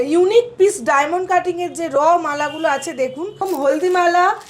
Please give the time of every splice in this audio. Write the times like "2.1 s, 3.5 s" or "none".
3.4 s